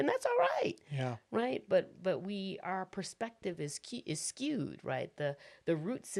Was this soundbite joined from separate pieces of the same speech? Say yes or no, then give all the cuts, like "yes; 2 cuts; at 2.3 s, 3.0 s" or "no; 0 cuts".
no; 0 cuts